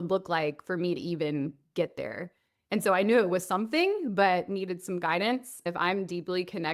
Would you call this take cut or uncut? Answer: cut